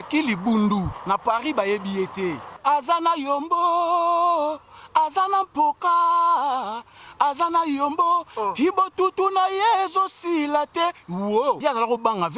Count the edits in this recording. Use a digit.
3